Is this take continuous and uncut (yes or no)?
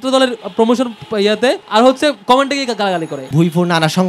no